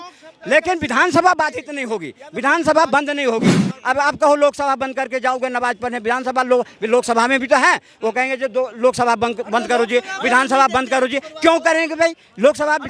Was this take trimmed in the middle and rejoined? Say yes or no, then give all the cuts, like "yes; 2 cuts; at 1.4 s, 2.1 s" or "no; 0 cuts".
no; 0 cuts